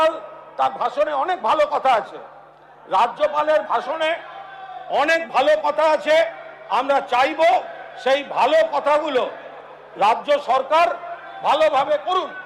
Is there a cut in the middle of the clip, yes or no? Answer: no